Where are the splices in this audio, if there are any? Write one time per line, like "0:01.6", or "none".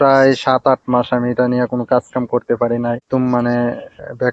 0:03.0